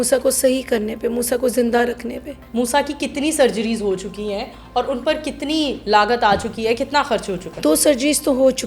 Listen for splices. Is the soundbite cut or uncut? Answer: cut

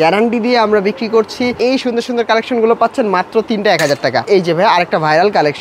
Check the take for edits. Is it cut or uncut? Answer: cut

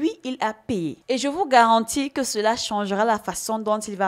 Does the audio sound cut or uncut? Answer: cut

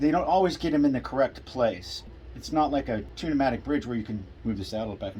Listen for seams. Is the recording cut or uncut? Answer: cut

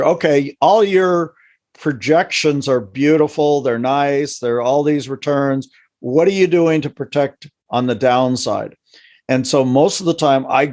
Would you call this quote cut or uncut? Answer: uncut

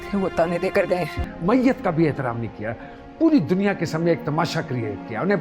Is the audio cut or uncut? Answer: cut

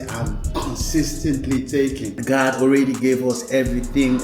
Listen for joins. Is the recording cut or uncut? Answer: cut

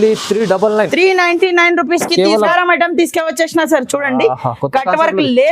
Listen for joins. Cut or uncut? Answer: cut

